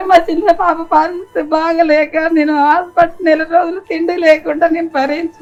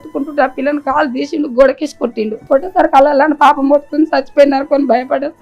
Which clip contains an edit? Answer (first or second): second